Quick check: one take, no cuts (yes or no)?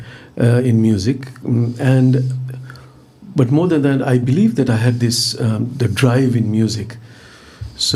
yes